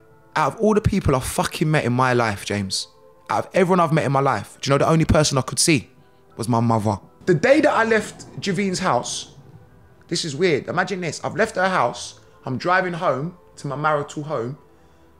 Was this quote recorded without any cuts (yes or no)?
no